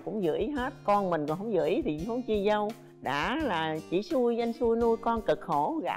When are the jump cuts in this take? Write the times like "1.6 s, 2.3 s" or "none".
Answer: none

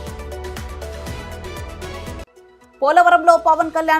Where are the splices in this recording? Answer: 2.2 s

